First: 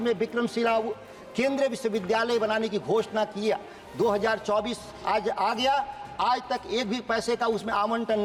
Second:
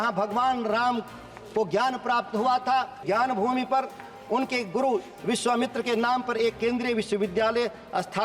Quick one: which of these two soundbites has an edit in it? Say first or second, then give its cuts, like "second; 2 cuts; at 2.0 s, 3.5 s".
second; 1 cut; at 3.0 s